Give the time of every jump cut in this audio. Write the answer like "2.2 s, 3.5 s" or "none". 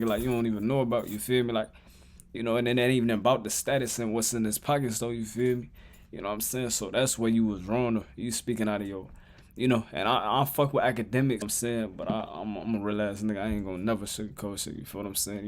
11.5 s